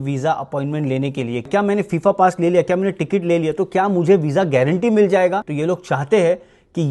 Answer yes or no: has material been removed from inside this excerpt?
yes